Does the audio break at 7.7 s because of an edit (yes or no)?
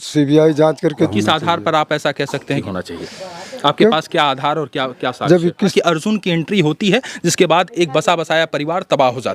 no